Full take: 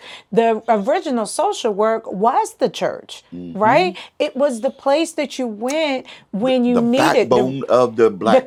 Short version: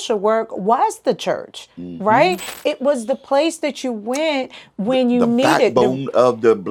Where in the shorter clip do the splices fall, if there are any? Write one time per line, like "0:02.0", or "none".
none